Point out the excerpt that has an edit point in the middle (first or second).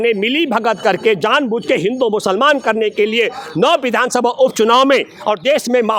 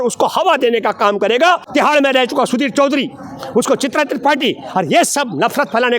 second